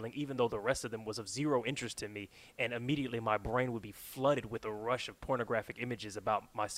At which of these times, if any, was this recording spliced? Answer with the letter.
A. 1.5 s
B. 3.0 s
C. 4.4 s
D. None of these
D